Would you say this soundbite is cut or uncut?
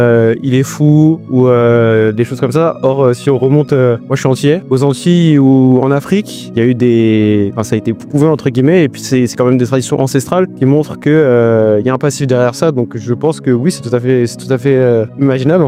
uncut